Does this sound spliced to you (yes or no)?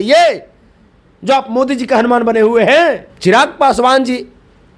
yes